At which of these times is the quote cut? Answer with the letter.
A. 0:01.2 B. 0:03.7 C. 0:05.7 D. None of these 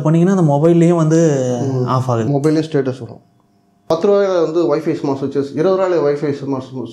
B